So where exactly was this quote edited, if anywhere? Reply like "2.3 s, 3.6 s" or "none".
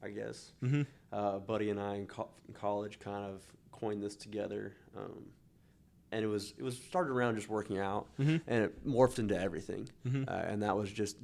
none